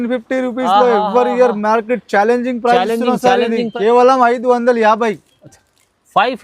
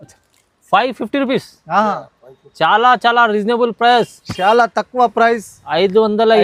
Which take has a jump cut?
first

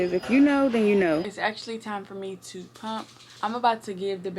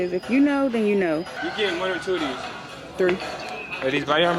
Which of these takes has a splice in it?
first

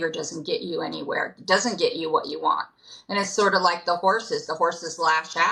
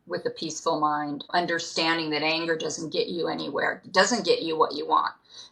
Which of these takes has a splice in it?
second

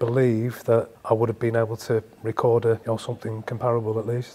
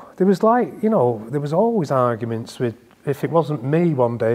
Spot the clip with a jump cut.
first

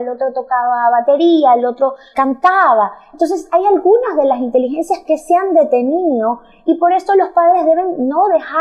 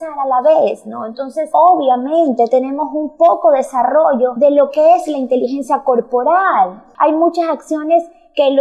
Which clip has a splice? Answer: second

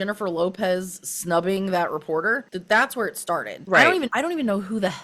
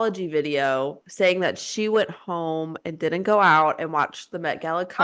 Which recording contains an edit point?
first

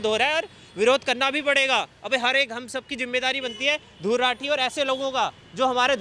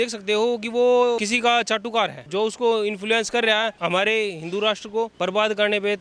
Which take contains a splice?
second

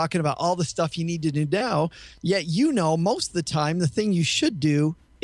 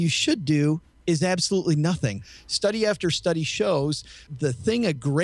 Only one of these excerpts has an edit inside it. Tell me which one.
second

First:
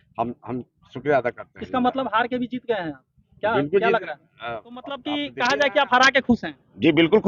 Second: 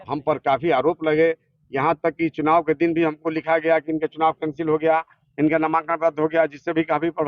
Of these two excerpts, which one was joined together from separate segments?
first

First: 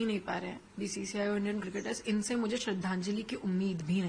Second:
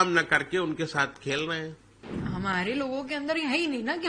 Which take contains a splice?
second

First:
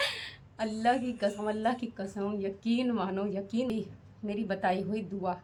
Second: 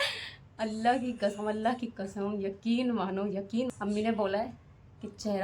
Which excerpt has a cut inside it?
second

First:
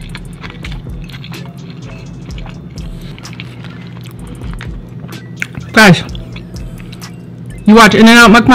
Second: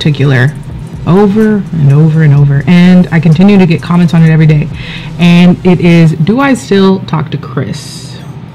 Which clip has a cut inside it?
first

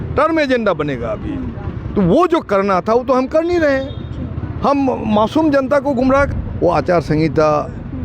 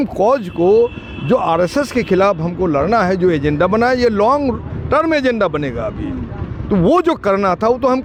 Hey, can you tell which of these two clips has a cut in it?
first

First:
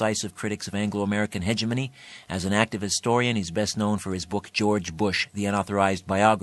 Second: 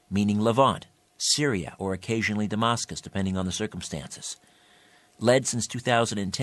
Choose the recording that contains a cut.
first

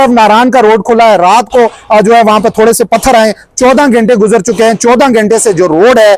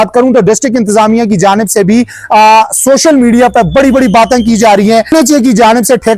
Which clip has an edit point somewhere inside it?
second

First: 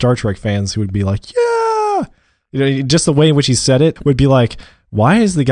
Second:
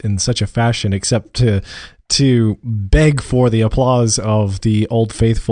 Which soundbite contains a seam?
first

